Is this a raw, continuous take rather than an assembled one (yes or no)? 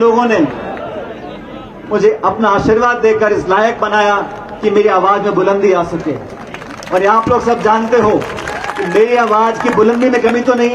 yes